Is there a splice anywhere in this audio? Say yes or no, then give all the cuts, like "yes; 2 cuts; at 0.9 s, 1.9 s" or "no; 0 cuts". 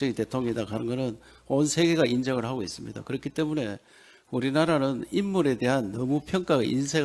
no; 0 cuts